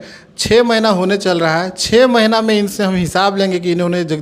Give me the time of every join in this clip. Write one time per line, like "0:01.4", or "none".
none